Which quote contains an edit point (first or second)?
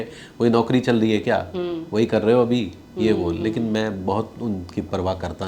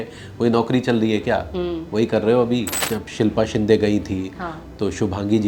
second